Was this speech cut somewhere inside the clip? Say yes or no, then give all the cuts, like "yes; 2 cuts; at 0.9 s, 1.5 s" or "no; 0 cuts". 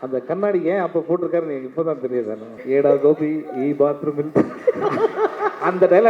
yes; 1 cut; at 2.6 s